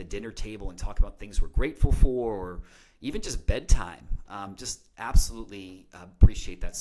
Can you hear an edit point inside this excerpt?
no; 0 cuts

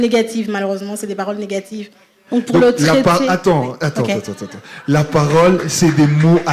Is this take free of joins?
yes; 0 cuts

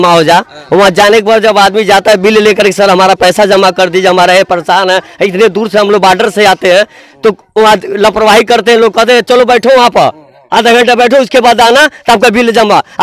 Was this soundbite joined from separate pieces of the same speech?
no; 0 cuts

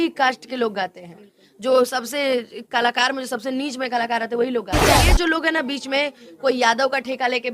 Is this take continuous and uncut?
no; 1 cut; at 5.0 s

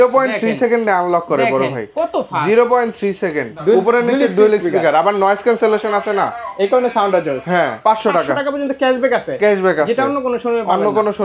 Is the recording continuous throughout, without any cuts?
no; 2 cuts; at 3.5 s, 7.8 s

